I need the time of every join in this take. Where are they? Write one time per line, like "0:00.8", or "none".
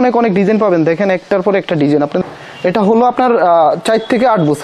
0:02.2